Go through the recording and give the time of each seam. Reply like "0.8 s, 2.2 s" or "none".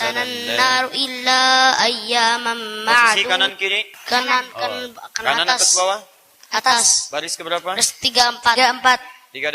3.9 s